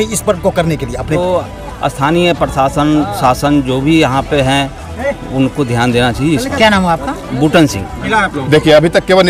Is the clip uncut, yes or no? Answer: no